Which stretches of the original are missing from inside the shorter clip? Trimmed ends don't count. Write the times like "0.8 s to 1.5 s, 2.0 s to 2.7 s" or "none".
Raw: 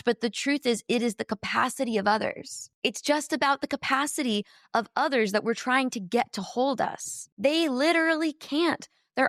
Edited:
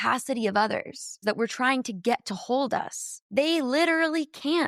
2.7 s to 5.3 s